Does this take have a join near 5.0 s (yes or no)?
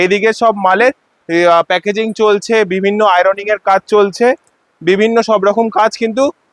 no